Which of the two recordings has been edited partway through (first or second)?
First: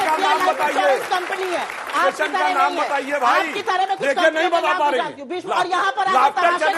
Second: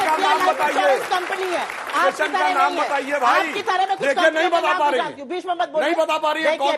first